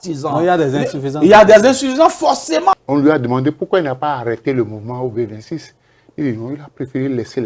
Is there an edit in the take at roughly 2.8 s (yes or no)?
yes